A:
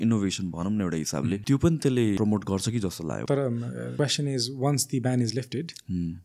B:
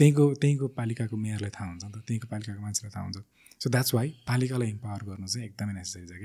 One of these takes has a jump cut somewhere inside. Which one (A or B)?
A